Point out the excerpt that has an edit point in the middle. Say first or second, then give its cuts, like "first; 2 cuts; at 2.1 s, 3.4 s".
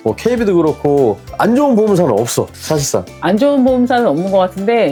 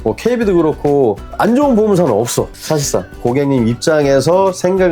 second; 1 cut; at 3.2 s